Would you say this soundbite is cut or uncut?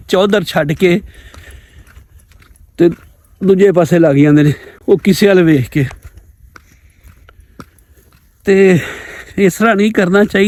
uncut